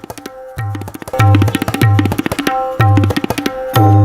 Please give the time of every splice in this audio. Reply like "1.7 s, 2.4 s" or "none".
none